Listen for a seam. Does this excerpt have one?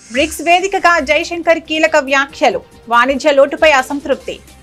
no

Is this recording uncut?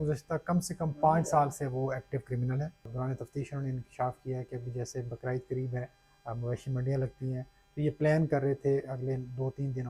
no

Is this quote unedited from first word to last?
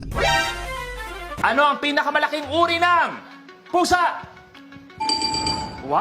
no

